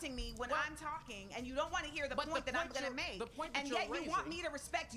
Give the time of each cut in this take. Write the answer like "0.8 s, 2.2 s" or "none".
none